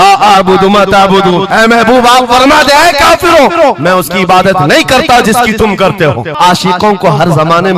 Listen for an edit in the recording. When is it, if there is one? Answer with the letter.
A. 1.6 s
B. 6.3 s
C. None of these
B